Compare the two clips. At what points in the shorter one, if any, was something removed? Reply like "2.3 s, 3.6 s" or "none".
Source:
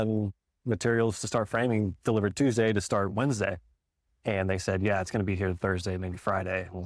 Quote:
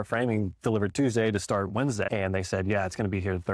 2.1 s